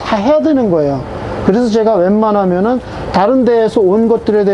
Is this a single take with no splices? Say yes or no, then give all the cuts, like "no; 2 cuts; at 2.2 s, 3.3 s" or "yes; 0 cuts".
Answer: yes; 0 cuts